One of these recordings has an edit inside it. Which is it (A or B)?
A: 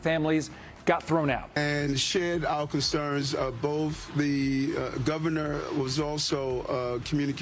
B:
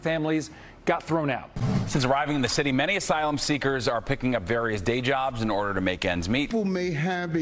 B